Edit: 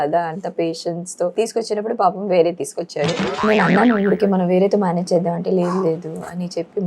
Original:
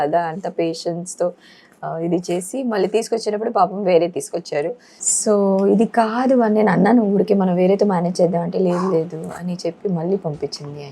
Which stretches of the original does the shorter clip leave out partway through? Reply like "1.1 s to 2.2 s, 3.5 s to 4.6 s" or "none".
1.3 s to 2.9 s, 5.0 s to 6.5 s